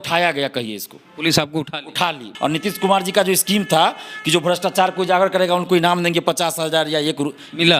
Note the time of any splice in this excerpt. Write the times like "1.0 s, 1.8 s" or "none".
2.3 s